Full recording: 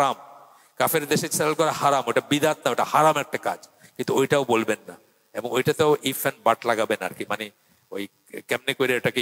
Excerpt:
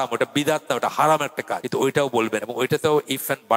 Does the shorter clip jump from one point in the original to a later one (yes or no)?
yes